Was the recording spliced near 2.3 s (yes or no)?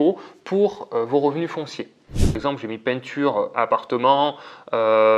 yes